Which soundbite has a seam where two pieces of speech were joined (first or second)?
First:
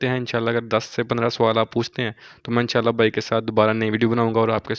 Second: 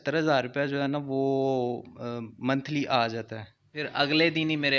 second